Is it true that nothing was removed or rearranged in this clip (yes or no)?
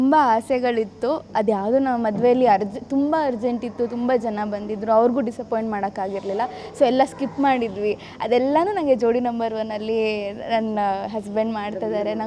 yes